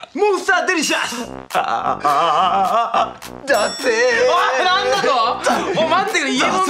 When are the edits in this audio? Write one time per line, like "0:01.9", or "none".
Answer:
none